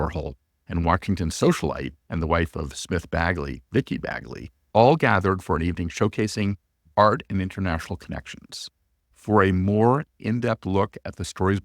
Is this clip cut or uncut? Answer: cut